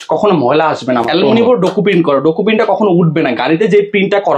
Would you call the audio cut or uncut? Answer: cut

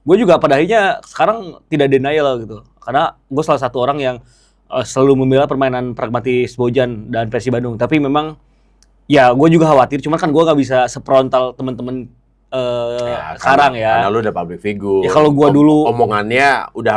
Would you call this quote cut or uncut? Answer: uncut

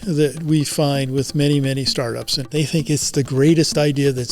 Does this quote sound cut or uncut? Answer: cut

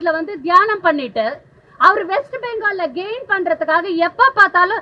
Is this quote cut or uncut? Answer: uncut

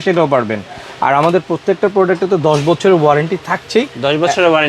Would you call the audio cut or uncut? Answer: uncut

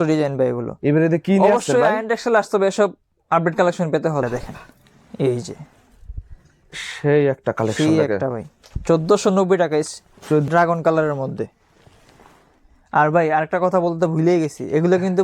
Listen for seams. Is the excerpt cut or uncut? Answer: cut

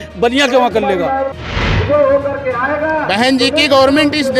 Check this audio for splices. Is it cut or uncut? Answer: cut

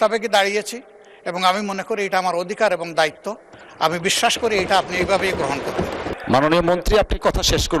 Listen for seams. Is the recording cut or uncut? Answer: cut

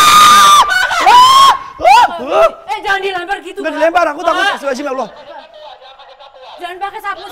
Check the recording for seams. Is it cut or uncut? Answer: uncut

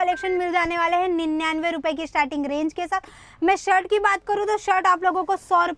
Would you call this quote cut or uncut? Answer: uncut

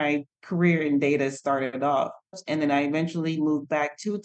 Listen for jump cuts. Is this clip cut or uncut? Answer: cut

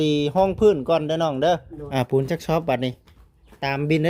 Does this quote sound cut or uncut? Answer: cut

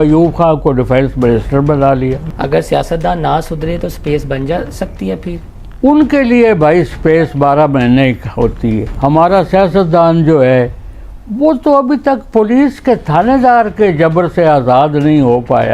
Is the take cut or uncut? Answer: cut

